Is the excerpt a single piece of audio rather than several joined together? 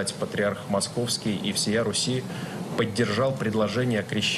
yes; 0 cuts

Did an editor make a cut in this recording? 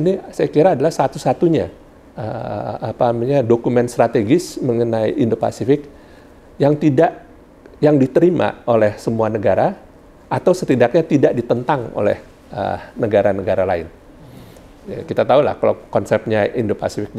no; 0 cuts

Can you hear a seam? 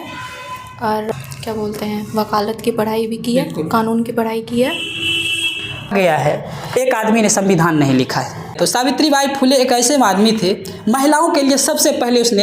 yes; 3 cuts; at 1.0 s, 5.9 s, 8.5 s

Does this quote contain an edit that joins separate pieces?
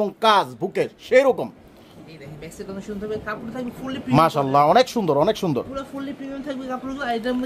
no; 0 cuts

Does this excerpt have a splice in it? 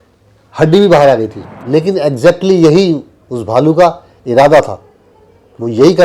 yes; 1 cut; at 1.2 s

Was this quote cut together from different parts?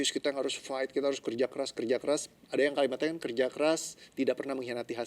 no; 0 cuts

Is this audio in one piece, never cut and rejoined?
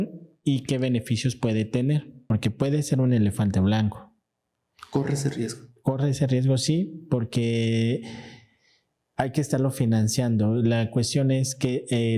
no; 1 cut; at 2.2 s

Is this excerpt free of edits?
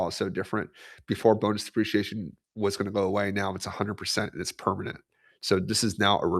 yes; 0 cuts

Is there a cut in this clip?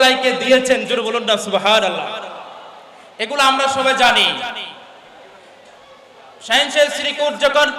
no; 0 cuts

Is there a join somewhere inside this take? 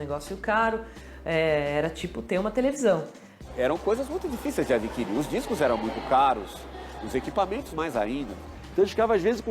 yes; 2 cuts; at 3.4 s, 8.6 s

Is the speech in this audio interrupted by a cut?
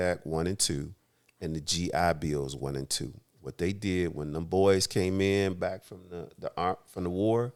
no; 0 cuts

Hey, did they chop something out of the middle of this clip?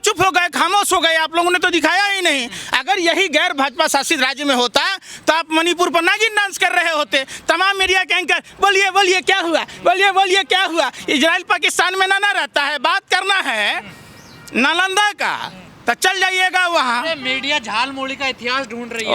no; 0 cuts

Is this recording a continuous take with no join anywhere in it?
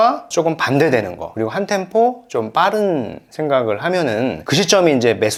yes; 0 cuts

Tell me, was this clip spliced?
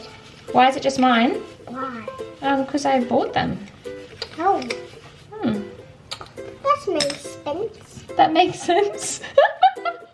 no; 0 cuts

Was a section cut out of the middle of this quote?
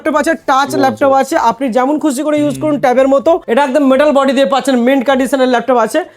yes; 1 cut; at 3.4 s

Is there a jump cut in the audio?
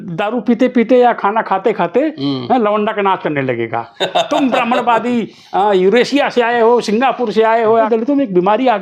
yes; 1 cut; at 7.9 s

